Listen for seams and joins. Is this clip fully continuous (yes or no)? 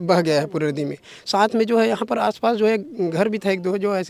yes